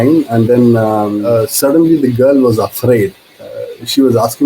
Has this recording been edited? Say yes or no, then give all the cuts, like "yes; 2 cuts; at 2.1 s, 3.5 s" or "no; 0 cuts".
yes; 1 cut; at 1.2 s